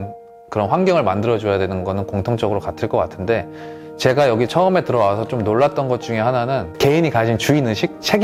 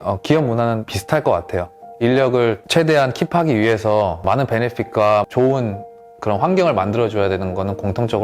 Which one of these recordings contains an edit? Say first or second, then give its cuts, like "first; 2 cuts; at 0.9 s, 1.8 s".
second; 3 cuts; at 1.0 s, 2.6 s, 4.2 s